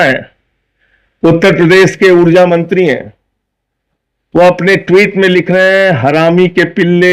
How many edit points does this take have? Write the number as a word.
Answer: zero